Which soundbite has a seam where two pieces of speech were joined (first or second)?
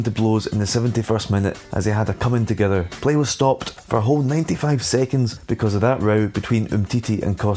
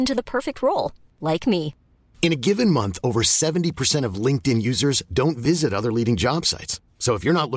first